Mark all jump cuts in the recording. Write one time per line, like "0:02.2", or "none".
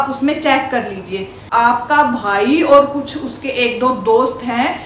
0:01.4